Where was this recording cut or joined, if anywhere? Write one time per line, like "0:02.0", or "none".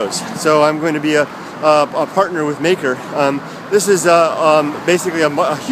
none